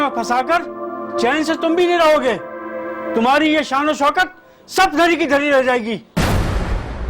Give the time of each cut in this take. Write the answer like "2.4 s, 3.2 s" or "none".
6.1 s